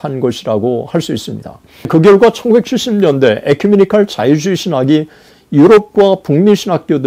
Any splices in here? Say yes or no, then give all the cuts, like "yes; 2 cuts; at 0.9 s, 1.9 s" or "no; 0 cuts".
yes; 1 cut; at 1.9 s